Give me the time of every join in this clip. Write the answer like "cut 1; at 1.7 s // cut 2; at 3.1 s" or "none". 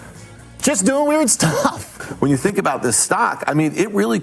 cut 1; at 2.0 s